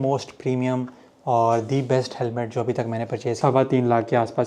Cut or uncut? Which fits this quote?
cut